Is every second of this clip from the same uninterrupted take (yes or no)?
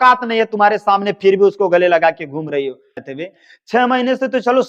no